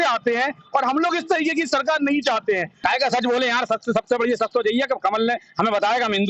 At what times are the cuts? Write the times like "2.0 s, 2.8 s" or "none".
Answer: 2.8 s